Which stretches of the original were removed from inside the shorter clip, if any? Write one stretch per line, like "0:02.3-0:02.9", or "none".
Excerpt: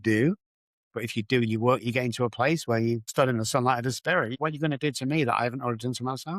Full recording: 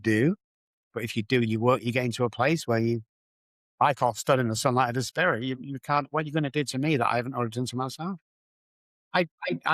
0:03.1-0:04.2
0:05.4-0:06.1